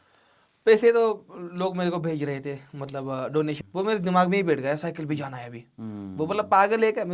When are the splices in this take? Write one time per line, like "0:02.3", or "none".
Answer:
0:03.6

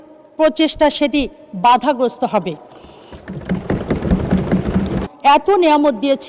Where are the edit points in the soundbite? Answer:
0:05.0

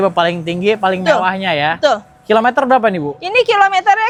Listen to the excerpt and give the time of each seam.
none

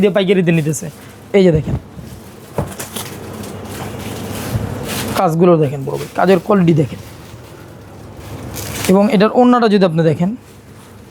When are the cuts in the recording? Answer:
none

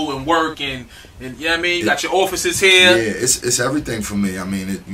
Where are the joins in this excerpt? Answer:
0:02.5

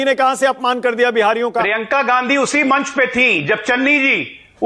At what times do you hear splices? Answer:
none

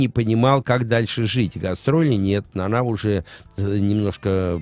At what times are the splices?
none

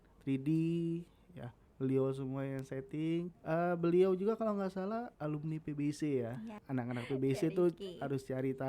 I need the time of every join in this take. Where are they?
0:03.4
0:05.1
0:06.6

